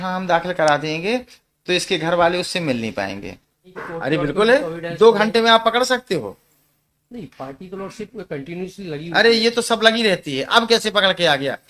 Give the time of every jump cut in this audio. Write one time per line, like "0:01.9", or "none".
0:03.7